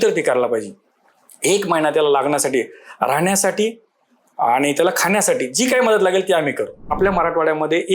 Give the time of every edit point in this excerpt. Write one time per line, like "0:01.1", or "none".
0:06.9

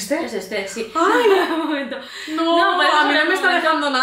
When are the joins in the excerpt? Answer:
none

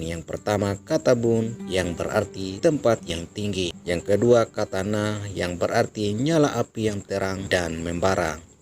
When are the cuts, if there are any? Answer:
0:02.0
0:03.8
0:07.4

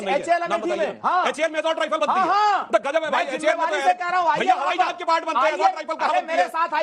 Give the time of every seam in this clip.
none

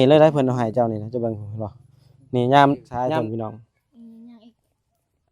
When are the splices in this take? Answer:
0:02.9

